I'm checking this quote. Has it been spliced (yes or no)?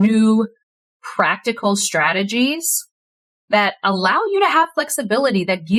no